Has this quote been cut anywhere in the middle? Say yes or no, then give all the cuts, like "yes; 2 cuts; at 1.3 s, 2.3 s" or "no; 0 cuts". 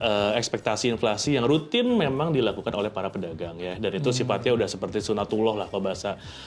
no; 0 cuts